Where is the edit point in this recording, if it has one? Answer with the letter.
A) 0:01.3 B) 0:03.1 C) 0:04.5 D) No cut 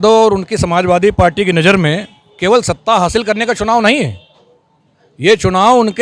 D